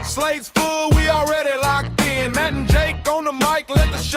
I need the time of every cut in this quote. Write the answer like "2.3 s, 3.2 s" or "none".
1.6 s

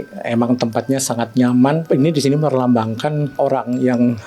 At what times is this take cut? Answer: 1.8 s, 3.4 s

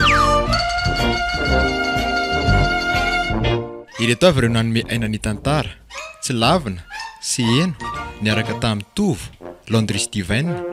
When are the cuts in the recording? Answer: none

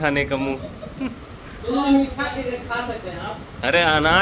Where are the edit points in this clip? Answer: none

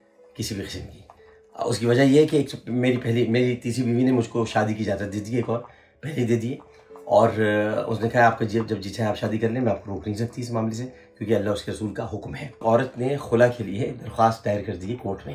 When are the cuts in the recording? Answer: 12.6 s

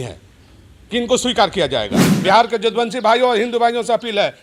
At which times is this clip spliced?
2.1 s

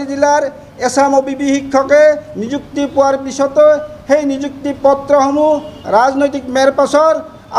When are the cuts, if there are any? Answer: none

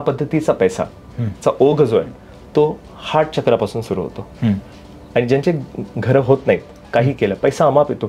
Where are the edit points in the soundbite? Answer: 4.8 s

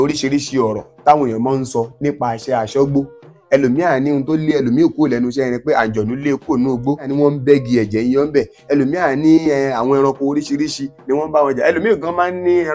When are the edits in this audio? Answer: 7.1 s

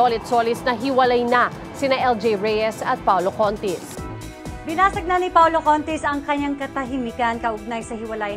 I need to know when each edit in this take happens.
none

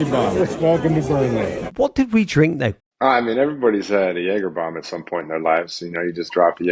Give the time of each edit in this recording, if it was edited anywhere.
1.6 s, 2.8 s

